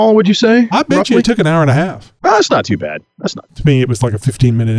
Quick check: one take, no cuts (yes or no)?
no